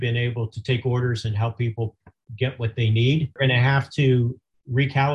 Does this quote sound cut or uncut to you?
cut